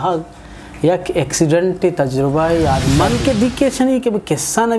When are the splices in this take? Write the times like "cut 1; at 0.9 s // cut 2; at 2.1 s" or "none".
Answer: cut 1; at 2.8 s

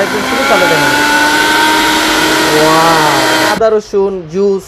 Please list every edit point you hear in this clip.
cut 1; at 3.5 s

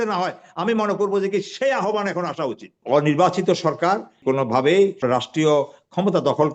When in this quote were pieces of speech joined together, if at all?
cut 1; at 2.8 s // cut 2; at 4.2 s // cut 3; at 5.0 s

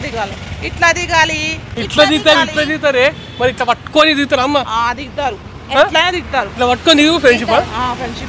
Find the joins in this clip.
none

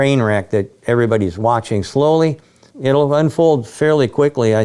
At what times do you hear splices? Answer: none

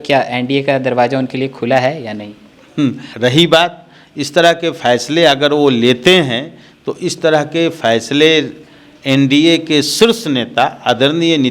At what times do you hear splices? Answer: cut 1; at 3.1 s

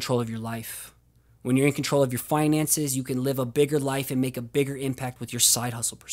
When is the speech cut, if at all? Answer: cut 1; at 5.1 s

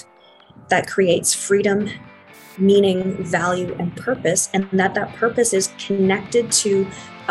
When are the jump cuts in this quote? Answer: none

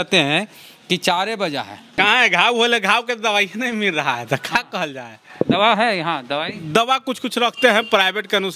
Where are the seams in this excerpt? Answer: cut 1; at 1.9 s

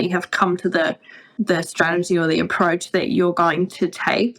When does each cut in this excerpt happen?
cut 1; at 1.2 s

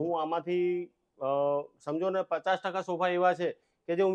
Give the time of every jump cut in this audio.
none

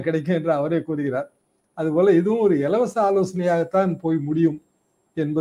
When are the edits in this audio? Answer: none

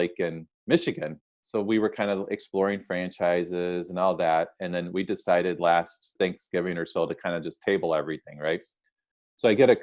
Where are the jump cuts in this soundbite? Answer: cut 1; at 1.2 s // cut 2; at 6.1 s

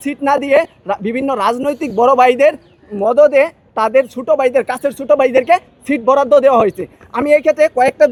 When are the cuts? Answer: none

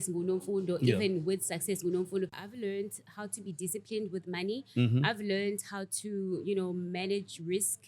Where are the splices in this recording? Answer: cut 1; at 2.4 s

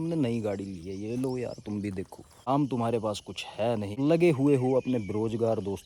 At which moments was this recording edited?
cut 1; at 2.5 s // cut 2; at 3.9 s

